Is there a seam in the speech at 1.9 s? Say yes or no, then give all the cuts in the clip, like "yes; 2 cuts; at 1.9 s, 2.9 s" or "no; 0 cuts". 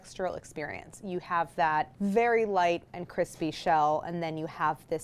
yes; 1 cut; at 1.9 s